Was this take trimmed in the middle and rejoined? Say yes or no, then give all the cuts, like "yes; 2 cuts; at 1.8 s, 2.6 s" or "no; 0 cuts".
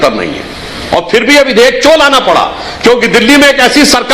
no; 0 cuts